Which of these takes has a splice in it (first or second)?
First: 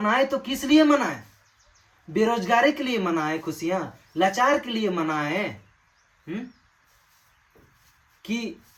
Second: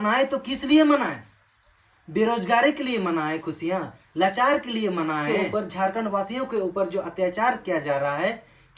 second